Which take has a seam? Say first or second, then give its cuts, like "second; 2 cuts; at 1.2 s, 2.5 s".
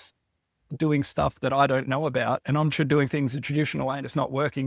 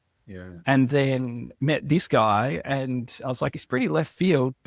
second; 1 cut; at 3.5 s